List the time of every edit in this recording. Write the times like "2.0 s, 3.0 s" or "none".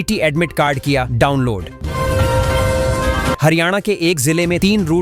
1.8 s, 3.4 s